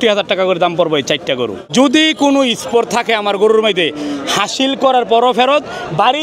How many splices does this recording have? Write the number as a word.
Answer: one